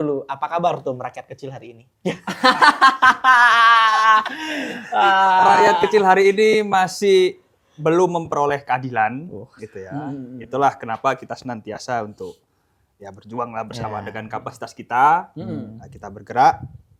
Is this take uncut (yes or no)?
yes